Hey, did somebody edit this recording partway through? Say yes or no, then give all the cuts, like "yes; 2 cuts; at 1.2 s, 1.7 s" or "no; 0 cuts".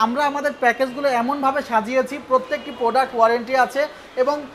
no; 0 cuts